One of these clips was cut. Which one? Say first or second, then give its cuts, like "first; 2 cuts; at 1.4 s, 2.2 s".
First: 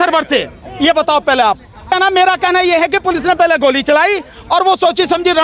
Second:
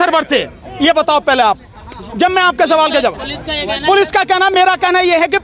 first; 1 cut; at 2.1 s